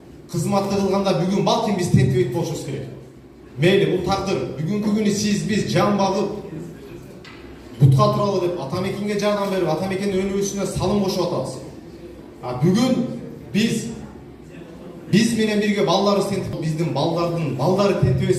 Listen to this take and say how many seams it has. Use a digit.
0